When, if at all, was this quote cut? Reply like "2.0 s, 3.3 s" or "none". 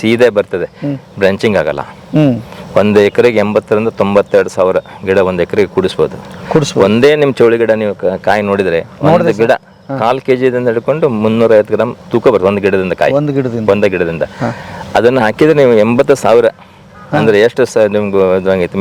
none